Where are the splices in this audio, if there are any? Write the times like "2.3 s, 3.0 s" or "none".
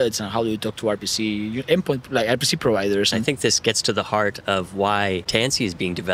3.2 s, 5.2 s